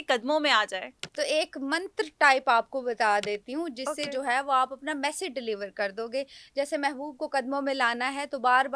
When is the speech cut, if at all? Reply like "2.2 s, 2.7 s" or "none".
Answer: 1.0 s